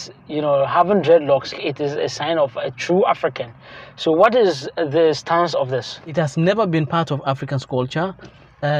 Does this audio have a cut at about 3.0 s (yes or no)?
no